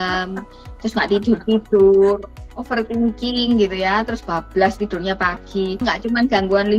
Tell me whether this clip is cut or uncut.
cut